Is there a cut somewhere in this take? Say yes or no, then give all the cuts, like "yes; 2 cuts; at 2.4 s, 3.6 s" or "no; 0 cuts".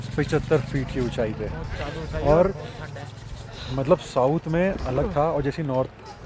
no; 0 cuts